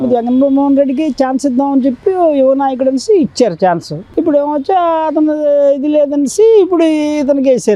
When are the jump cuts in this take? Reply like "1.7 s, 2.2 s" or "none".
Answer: none